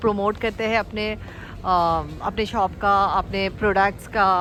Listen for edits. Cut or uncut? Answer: uncut